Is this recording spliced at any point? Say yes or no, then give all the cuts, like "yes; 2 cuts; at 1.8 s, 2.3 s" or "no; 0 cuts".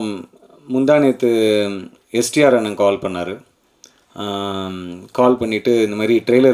no; 0 cuts